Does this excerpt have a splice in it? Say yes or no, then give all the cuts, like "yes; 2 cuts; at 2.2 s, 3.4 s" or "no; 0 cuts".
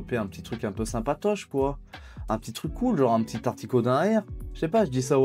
no; 0 cuts